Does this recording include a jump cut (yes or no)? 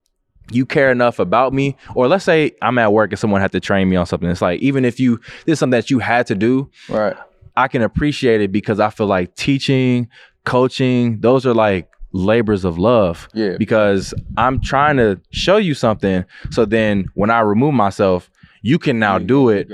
no